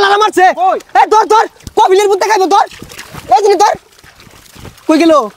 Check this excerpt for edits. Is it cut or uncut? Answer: uncut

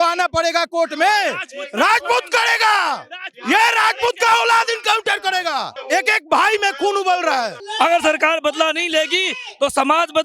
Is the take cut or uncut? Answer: cut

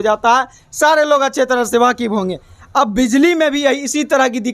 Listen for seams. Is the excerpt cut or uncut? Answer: uncut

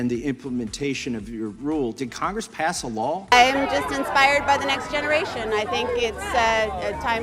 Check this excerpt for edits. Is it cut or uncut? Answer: cut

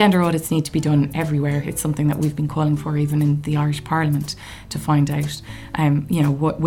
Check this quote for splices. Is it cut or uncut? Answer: uncut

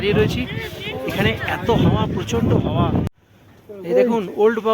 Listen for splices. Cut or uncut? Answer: cut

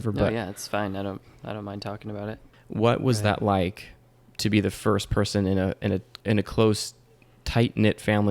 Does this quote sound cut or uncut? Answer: cut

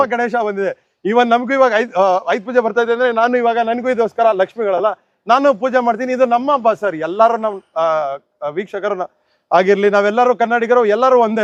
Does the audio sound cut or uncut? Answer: uncut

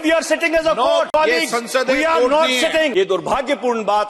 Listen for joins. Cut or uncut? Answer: cut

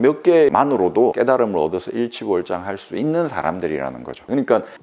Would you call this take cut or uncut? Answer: uncut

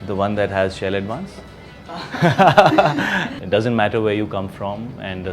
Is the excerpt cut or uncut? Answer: cut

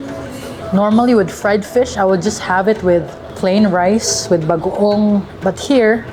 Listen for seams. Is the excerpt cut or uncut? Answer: uncut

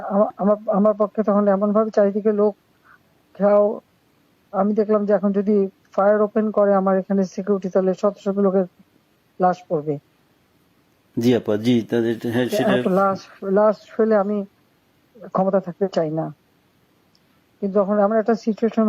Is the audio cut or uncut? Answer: uncut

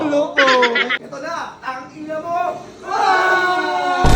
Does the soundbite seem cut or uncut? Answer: cut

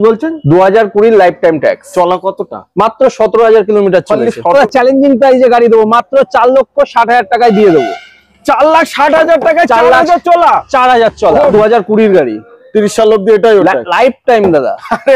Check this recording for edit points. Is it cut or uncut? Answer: cut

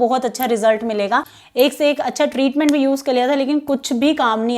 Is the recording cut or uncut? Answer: cut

